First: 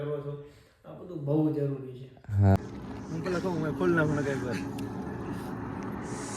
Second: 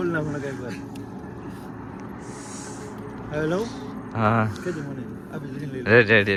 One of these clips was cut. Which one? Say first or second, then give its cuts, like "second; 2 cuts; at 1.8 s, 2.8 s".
first; 1 cut; at 2.6 s